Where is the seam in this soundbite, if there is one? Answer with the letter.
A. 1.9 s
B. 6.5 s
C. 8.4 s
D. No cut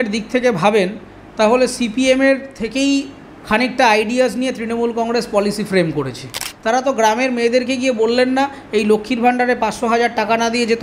B